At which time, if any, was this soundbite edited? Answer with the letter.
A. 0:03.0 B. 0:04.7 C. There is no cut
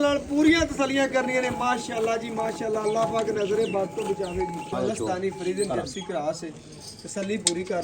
B